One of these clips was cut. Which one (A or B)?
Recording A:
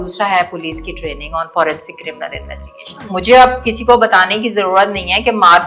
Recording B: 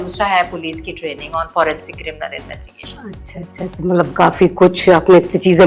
A